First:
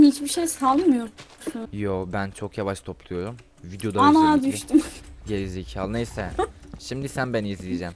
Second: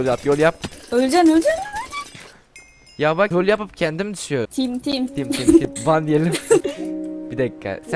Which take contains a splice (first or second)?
second